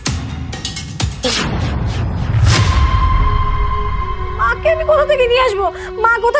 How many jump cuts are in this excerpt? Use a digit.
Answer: 1